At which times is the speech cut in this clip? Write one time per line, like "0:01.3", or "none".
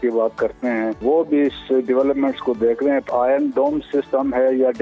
0:01.0
0:03.1